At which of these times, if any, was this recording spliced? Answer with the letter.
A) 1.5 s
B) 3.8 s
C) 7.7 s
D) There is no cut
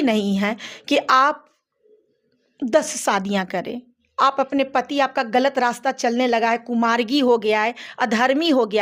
D